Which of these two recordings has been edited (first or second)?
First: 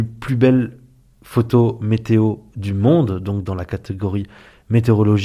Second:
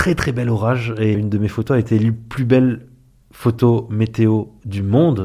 second